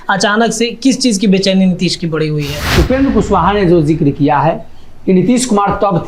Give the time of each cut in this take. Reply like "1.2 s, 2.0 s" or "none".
2.6 s